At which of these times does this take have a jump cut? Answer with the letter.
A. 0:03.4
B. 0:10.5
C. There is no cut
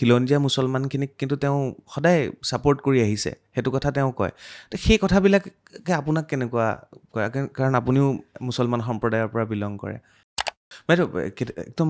B